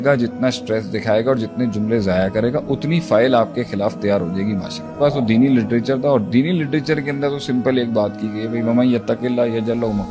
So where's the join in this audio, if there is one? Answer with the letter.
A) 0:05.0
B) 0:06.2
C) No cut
A